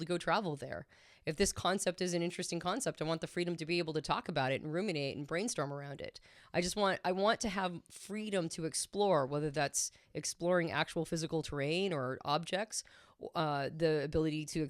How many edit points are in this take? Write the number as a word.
zero